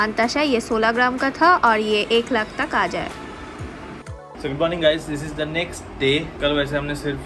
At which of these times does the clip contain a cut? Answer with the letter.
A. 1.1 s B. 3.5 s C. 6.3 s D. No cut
D